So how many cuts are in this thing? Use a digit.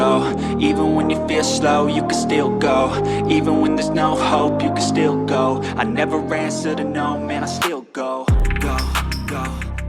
0